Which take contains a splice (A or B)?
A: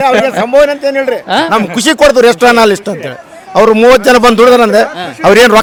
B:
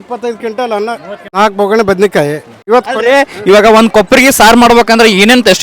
B